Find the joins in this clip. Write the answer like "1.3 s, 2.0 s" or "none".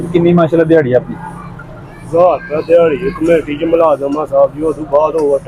none